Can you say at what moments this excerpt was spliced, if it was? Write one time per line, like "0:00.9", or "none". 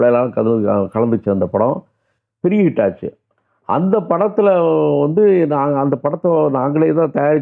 none